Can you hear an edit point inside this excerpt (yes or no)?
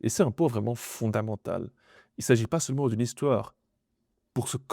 yes